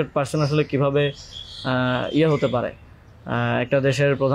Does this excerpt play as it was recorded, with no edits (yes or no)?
yes